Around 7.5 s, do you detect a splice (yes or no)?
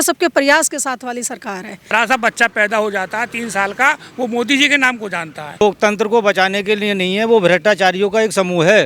no